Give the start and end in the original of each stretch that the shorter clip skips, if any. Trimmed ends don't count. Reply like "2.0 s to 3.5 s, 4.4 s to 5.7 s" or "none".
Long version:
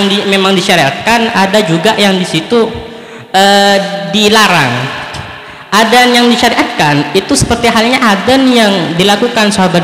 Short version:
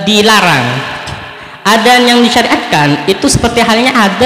none